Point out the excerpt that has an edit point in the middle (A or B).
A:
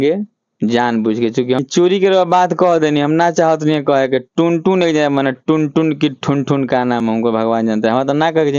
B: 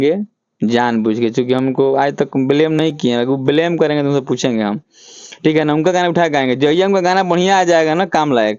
A